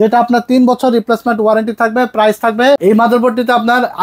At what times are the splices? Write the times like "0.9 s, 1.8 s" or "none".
2.8 s